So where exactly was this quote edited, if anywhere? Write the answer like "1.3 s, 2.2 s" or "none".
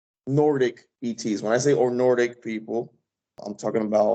none